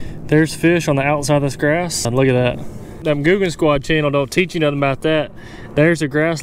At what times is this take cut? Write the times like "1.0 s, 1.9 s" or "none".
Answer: 2.1 s